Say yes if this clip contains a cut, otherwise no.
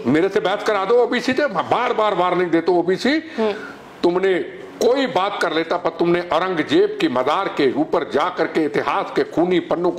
no